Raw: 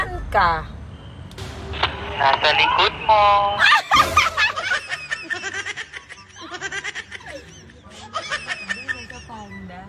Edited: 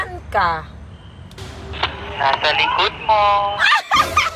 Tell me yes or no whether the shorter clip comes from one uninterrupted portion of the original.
yes